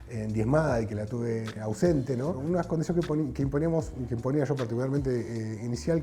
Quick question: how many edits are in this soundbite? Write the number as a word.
two